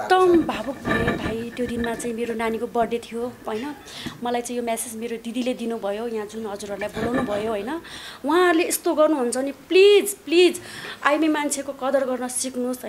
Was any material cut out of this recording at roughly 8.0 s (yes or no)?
yes